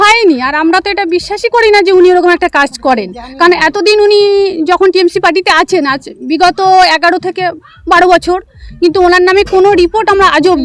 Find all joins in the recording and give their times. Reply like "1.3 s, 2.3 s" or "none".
none